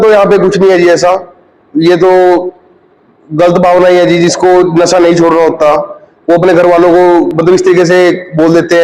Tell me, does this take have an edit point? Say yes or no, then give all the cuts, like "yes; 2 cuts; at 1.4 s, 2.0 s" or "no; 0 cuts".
no; 0 cuts